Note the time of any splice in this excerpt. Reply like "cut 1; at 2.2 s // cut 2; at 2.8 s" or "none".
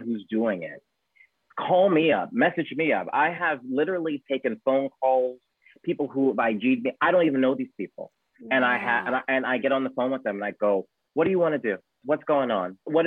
none